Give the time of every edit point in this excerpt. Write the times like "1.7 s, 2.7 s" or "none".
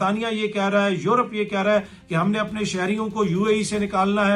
none